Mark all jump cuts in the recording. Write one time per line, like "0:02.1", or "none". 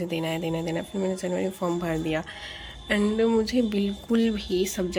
none